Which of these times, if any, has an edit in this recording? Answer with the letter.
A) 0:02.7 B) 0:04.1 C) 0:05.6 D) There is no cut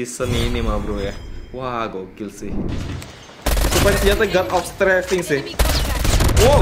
A